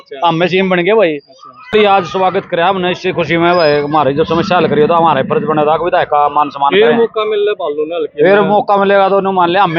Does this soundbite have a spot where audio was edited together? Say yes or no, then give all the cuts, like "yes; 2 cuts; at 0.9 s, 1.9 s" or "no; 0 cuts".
yes; 1 cut; at 1.7 s